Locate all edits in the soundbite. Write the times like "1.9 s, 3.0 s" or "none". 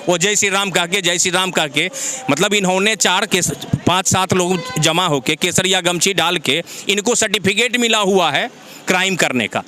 none

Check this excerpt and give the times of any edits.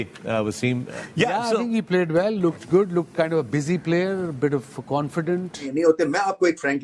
1.0 s, 5.7 s

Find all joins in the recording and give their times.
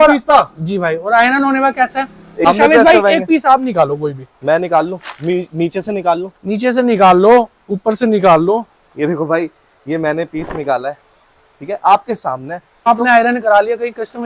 2.5 s, 12.9 s

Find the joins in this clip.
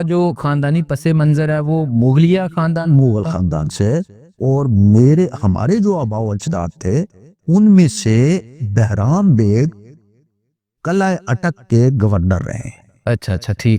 none

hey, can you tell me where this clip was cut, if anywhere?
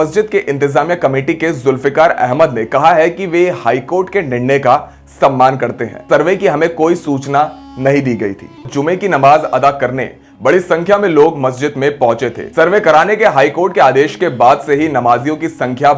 6.0 s, 8.7 s, 12.4 s

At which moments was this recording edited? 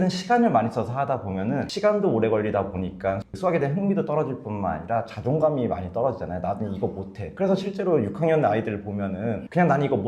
1.7 s

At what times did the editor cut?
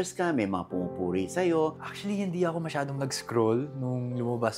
1.8 s

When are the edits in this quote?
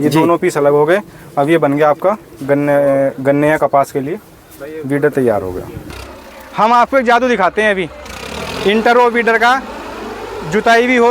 6.0 s

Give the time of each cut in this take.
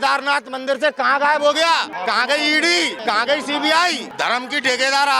1.9 s, 3.0 s, 4.1 s

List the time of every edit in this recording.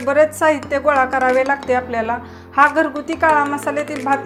none

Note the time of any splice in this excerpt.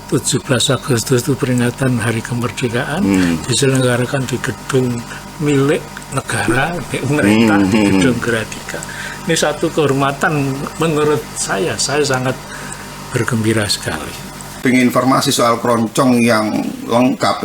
14.6 s

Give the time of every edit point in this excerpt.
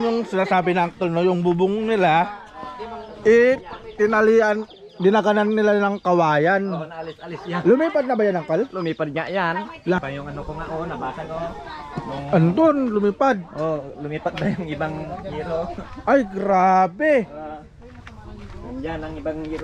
10.0 s

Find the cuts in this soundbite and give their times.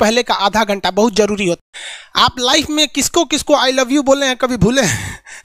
1.6 s

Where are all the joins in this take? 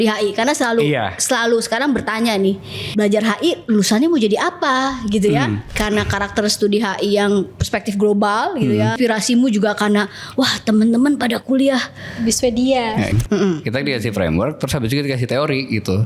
2.7 s, 5.7 s, 9.0 s, 13.1 s

